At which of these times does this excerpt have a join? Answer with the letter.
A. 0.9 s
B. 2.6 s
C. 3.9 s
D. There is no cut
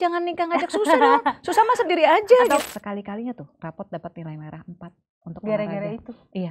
B